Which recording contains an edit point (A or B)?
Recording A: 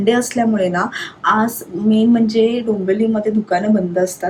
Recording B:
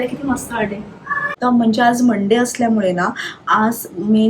B